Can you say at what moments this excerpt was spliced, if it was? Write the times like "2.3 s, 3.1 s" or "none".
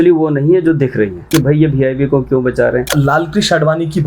1.3 s, 2.9 s